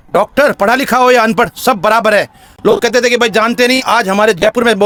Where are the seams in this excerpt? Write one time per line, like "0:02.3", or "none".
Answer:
none